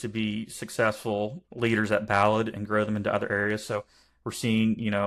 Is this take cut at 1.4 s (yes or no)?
yes